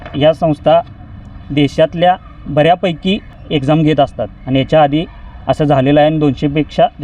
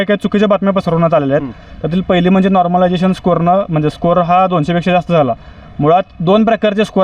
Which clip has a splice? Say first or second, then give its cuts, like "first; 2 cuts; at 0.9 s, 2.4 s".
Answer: first; 1 cut; at 3.3 s